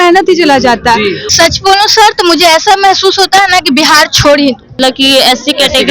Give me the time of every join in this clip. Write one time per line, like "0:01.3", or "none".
0:01.2
0:05.0